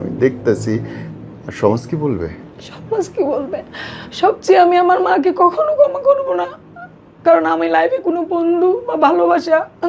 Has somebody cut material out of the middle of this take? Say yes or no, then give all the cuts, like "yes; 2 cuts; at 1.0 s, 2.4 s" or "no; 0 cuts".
no; 0 cuts